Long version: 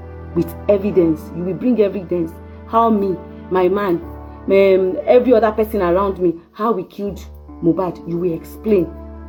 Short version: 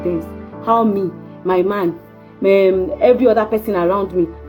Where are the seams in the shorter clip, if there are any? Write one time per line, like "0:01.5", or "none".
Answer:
none